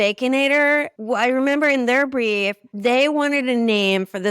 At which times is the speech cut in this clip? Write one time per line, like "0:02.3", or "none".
0:00.9